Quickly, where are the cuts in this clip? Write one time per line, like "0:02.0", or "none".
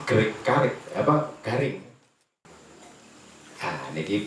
0:02.4